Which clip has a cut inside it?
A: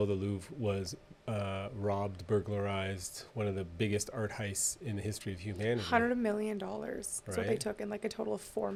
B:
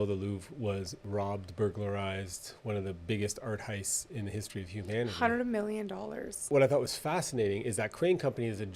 B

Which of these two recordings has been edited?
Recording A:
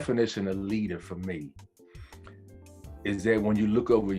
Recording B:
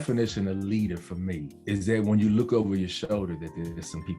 B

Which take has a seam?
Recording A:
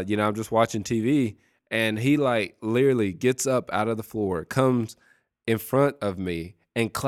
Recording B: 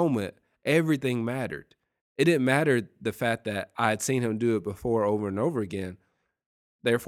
A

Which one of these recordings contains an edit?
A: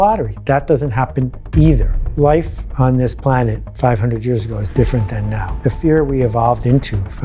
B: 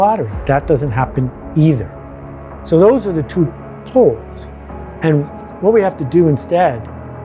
A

